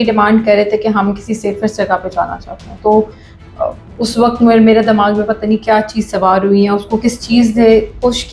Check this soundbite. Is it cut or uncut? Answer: uncut